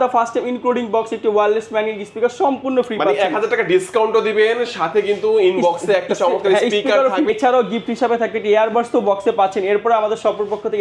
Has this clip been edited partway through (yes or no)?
yes